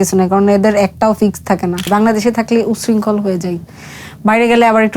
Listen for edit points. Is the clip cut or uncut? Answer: cut